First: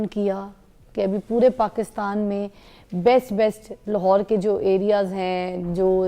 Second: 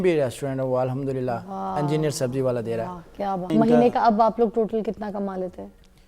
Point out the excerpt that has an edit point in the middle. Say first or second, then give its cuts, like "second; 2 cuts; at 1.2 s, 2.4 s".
second; 1 cut; at 3.5 s